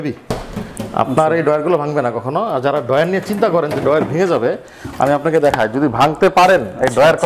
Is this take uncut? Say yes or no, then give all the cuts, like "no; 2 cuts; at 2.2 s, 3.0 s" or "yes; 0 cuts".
yes; 0 cuts